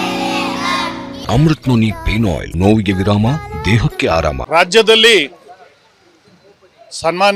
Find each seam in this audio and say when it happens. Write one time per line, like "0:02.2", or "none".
0:01.1
0:02.5
0:04.4